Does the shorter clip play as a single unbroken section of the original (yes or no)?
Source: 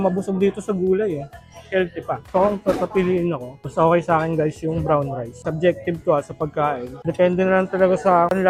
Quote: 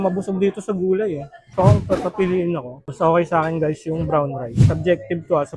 no